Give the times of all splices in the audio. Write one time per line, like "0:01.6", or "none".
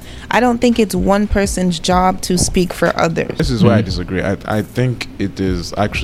0:03.4